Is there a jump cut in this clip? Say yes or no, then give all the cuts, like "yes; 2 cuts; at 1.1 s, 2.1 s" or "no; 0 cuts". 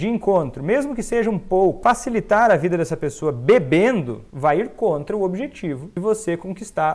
yes; 3 cuts; at 1.8 s, 4.2 s, 5.9 s